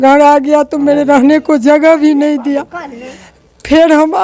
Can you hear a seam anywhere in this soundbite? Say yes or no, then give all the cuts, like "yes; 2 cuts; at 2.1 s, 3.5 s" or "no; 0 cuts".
no; 0 cuts